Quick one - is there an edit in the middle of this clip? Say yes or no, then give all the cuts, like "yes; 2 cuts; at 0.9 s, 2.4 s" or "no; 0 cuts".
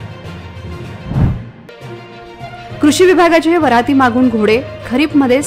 yes; 1 cut; at 1.0 s